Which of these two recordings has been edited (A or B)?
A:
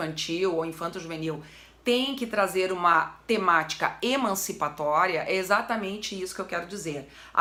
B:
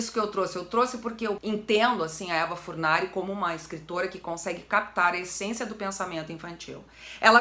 B